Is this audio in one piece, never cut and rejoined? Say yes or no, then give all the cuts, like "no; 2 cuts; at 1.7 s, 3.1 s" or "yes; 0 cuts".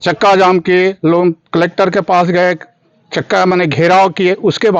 yes; 0 cuts